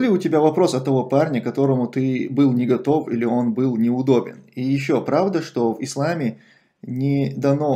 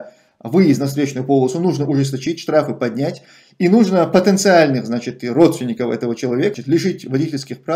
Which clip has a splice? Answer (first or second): second